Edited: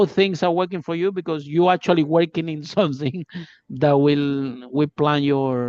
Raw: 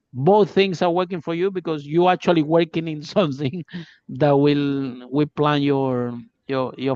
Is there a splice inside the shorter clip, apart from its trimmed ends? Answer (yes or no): no